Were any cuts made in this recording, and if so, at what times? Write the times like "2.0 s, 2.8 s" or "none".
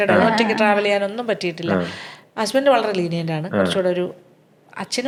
none